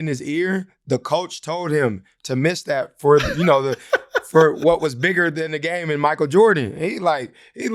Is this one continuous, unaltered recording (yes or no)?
yes